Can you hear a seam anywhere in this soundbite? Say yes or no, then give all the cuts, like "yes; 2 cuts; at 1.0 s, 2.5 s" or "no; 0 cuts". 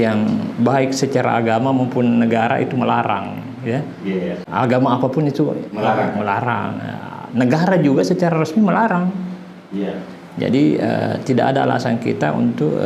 no; 0 cuts